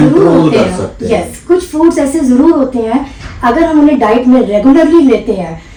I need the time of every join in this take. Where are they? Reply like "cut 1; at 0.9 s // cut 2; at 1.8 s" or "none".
none